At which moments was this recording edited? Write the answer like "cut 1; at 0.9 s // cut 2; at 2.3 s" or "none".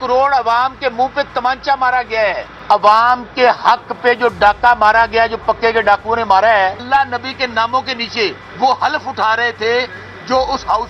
cut 1; at 2.5 s // cut 2; at 6.9 s // cut 3; at 8.4 s